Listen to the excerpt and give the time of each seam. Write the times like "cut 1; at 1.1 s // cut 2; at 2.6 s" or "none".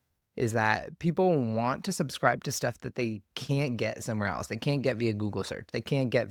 none

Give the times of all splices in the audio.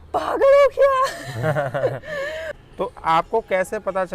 cut 1; at 2.5 s

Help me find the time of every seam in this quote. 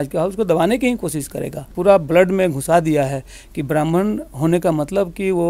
cut 1; at 1.7 s

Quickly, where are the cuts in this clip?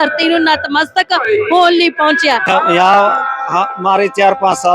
cut 1; at 2.5 s

